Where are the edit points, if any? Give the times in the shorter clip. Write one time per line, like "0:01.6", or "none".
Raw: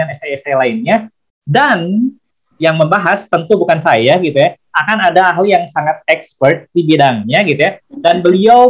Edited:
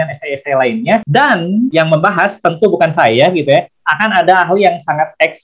0:01.4